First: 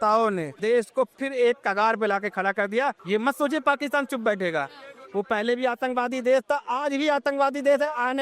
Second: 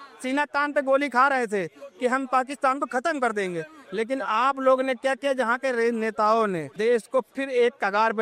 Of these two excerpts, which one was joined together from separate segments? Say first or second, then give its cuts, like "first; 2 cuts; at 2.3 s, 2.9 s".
first; 1 cut; at 3.0 s